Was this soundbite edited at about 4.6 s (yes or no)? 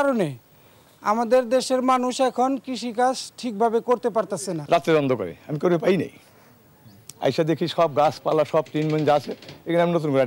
yes